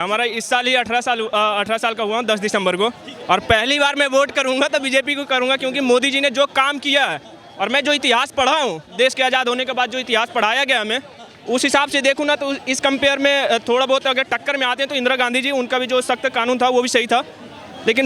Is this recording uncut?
yes; 0 cuts

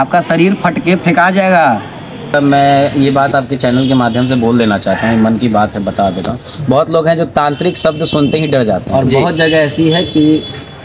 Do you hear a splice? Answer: yes; 2 cuts; at 2.3 s, 8.9 s

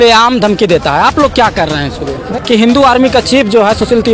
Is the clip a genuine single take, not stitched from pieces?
no; 1 cut; at 2.2 s

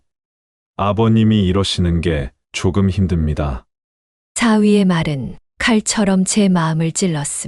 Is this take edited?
no; 0 cuts

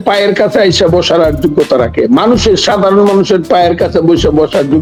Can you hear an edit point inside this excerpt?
no; 0 cuts

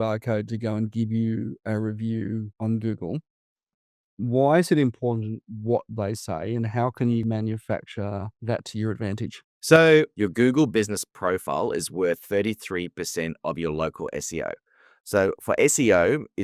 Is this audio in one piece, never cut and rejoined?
no; 2 cuts; at 3.7 s, 7.2 s

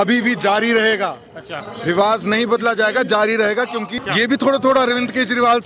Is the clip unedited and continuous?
no; 1 cut; at 4.0 s

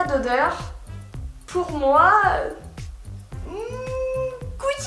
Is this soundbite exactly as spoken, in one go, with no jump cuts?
yes; 0 cuts

